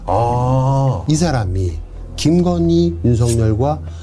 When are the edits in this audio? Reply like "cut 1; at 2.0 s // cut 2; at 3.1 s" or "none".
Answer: cut 1; at 1.0 s